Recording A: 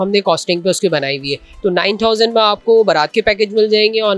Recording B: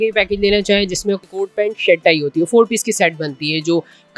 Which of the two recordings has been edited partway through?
B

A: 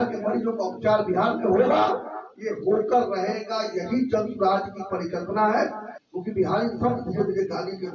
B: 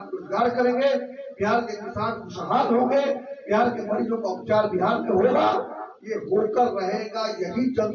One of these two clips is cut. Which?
A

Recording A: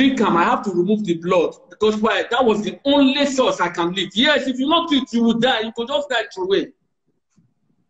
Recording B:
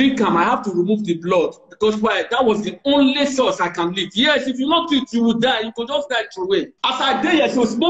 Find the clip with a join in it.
B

